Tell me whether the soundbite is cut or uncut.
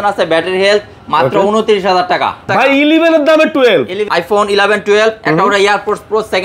cut